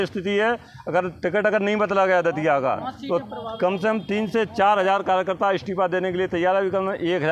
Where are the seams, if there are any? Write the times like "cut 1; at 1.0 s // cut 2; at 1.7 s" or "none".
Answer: none